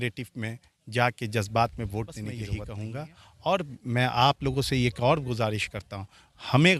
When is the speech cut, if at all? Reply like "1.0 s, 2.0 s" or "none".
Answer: 2.6 s

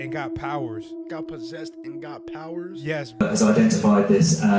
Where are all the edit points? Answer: 3.2 s

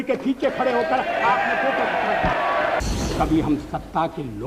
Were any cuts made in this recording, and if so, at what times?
2.8 s

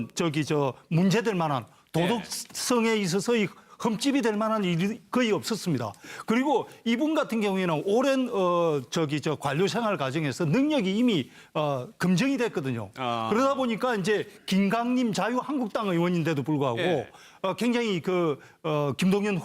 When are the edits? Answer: 18.4 s

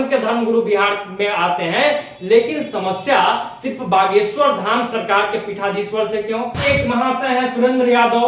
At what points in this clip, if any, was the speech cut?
6.7 s

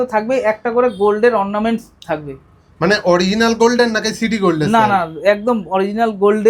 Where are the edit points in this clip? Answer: none

